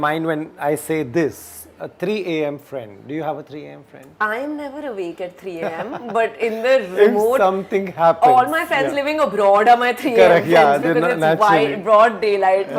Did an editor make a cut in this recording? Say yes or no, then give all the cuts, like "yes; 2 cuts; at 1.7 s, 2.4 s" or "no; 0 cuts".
no; 0 cuts